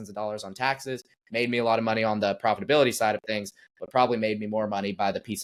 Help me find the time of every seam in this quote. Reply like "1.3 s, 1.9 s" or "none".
none